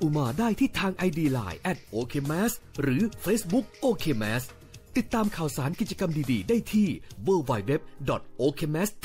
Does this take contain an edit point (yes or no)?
no